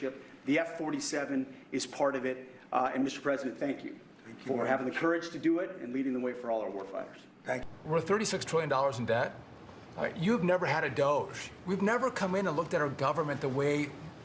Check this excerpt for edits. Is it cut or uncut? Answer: cut